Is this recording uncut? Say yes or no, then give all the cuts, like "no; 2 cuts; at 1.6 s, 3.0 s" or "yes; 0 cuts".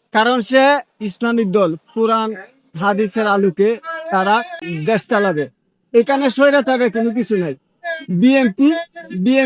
no; 1 cut; at 4.6 s